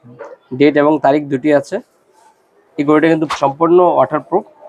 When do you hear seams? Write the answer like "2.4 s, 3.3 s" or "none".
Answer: 3.3 s